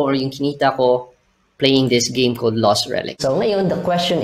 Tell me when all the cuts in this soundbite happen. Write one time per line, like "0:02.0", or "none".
0:03.2